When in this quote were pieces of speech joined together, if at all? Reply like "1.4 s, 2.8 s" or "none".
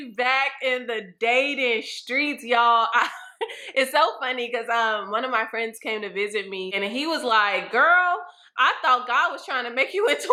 none